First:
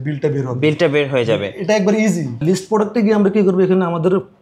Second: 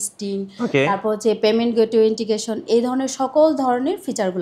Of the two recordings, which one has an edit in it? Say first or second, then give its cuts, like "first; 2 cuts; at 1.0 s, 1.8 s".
first; 1 cut; at 2.4 s